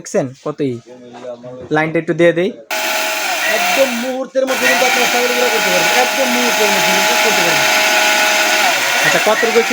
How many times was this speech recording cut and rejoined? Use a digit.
1